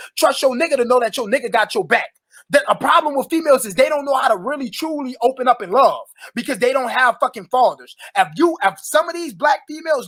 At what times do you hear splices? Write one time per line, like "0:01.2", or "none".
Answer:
none

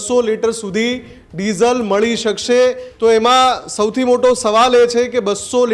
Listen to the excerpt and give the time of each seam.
0:02.9

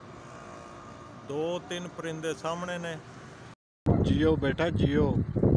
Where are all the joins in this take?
0:03.9

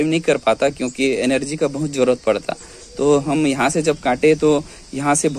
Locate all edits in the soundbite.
none

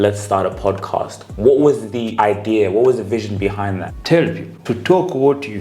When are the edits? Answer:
0:02.0
0:03.9
0:04.5

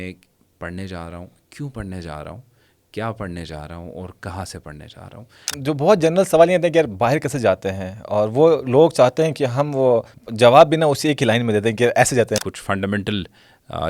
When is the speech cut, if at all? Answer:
0:05.5
0:10.2
0:12.4

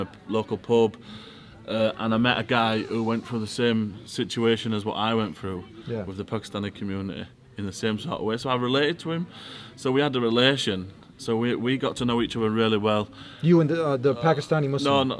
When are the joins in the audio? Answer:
none

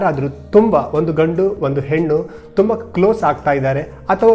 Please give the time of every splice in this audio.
none

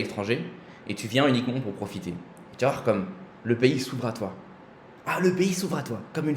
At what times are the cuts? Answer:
none

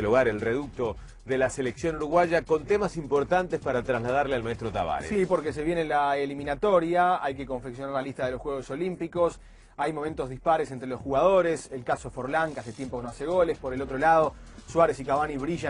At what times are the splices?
0:06.2

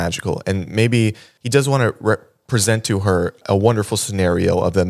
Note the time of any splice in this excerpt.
0:01.3
0:03.4

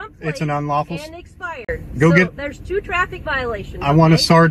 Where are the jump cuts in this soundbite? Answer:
none

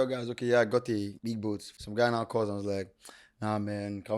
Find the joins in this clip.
0:01.4

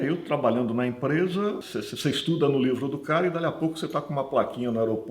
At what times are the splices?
0:01.7

